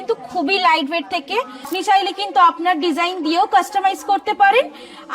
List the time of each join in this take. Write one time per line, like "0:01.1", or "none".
0:01.7